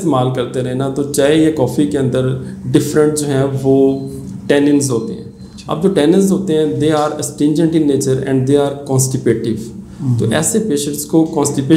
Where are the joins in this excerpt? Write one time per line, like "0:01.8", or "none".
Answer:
none